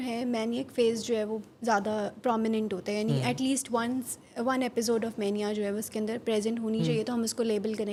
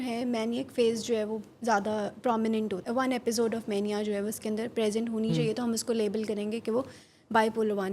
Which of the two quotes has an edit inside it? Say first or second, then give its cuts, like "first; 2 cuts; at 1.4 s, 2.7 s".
second; 1 cut; at 2.8 s